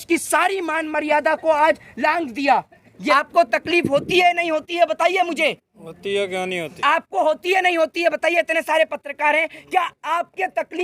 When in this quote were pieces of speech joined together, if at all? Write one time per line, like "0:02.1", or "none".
0:02.9